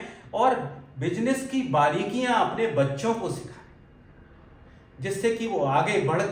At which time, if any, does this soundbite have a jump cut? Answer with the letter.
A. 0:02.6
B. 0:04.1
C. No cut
C